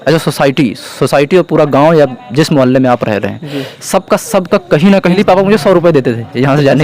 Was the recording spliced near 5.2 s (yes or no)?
yes